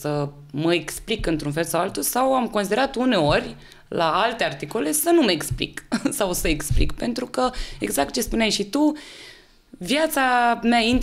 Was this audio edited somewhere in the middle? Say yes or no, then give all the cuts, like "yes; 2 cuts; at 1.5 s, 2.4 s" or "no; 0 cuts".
no; 0 cuts